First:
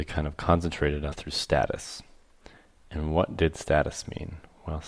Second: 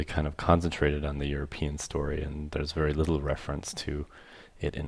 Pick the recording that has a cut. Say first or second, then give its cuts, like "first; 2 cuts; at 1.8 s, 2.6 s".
second; 1 cut; at 1.2 s